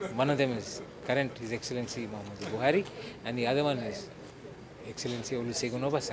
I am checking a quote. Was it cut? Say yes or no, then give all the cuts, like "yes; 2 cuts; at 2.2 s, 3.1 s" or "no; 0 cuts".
no; 0 cuts